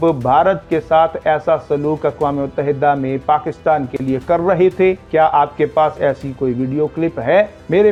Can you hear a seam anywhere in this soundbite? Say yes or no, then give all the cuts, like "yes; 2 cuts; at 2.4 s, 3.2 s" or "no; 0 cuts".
no; 0 cuts